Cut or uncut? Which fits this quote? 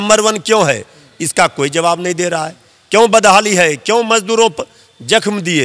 uncut